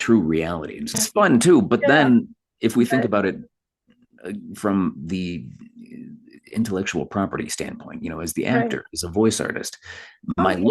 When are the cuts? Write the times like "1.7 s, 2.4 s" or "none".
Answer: 1.0 s